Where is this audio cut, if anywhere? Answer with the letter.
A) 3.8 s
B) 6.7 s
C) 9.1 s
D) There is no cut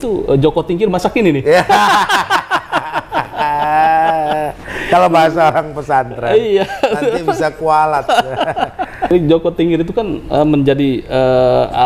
C